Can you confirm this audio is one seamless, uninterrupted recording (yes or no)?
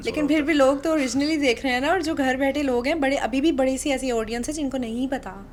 yes